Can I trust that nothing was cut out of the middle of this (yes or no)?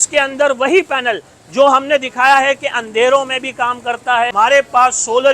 no